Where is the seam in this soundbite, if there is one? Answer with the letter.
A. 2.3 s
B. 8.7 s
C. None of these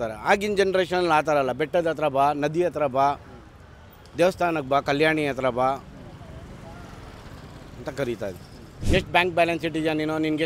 B